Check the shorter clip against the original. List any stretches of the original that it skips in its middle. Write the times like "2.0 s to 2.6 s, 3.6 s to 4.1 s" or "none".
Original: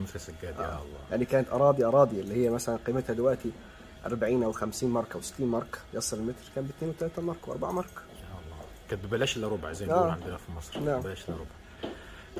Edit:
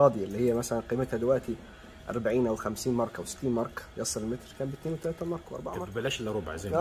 7.8 s to 9.0 s